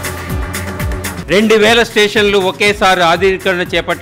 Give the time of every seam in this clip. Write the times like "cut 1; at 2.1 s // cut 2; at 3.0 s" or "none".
cut 1; at 1.2 s